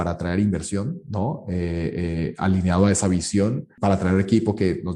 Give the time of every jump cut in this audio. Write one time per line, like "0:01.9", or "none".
0:03.7